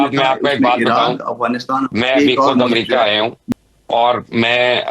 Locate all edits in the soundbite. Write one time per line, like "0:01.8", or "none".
0:03.4